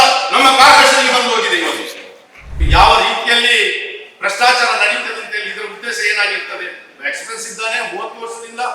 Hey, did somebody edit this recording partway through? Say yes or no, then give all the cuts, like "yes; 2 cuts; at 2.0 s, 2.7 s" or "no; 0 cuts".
yes; 1 cut; at 2.6 s